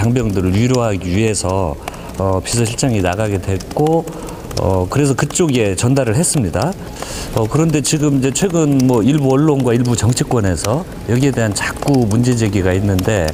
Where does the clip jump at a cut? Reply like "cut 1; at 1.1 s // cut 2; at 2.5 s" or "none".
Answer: cut 1; at 6.3 s